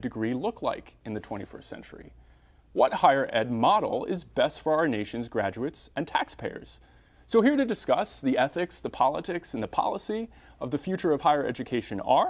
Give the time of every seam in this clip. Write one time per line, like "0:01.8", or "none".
0:07.5